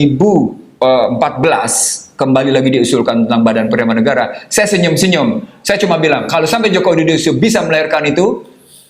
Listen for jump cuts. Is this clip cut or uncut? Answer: uncut